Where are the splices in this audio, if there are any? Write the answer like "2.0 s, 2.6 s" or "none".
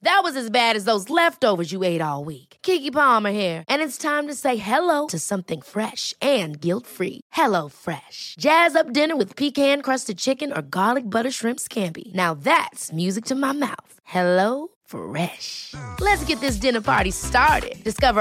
none

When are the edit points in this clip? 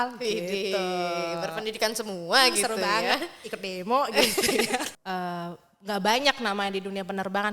5.0 s

